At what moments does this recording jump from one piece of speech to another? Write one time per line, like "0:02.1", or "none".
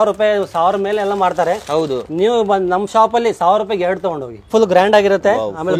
0:04.5